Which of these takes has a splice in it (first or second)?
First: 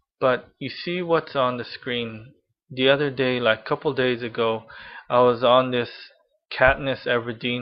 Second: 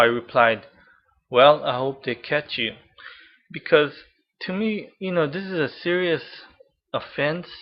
first